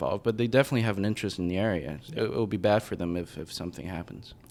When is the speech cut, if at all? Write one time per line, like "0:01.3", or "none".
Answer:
none